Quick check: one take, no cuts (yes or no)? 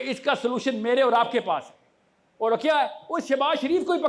yes